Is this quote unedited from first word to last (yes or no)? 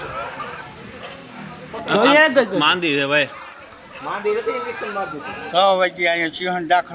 no